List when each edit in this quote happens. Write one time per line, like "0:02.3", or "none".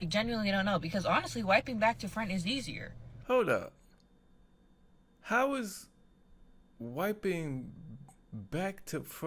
0:03.1